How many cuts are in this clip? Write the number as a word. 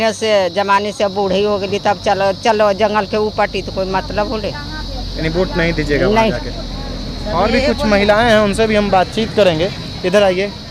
zero